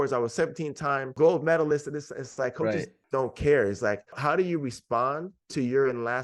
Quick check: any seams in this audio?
yes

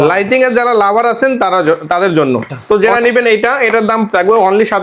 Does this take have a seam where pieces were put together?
yes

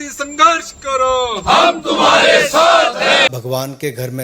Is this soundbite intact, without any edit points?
no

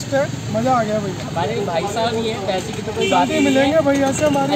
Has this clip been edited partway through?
no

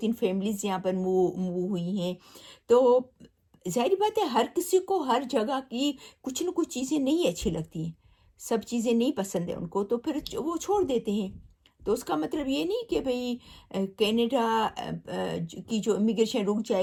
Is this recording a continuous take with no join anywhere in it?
yes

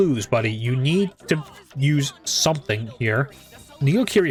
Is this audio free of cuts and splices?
yes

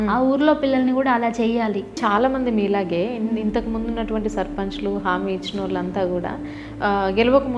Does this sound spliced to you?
yes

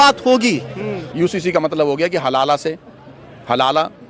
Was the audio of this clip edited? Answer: yes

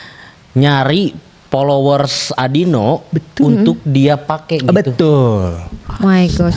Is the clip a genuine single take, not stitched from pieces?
yes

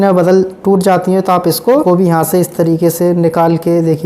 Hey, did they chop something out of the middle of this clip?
yes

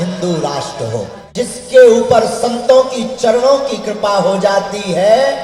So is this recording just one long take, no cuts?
no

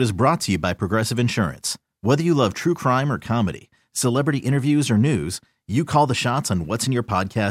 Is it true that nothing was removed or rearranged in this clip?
yes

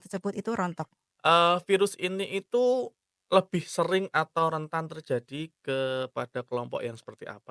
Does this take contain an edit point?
yes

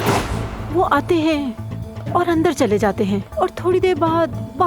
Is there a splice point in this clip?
no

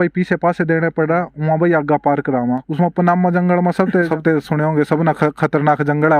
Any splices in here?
yes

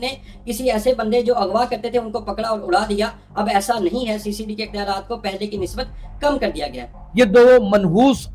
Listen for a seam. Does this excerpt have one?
yes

